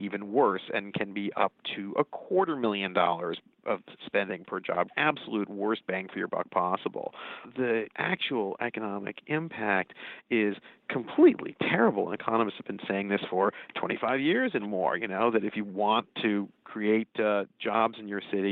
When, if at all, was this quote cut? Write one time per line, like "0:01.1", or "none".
0:04.9
0:07.5